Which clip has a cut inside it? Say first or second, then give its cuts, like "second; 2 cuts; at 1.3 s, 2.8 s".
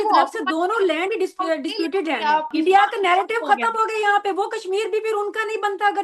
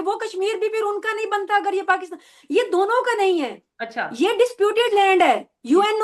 first; 1 cut; at 2.5 s